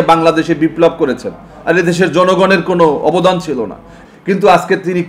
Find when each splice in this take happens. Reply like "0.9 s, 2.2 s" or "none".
3.9 s